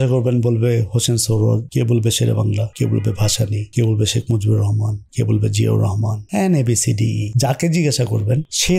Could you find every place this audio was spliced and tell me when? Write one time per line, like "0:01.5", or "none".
none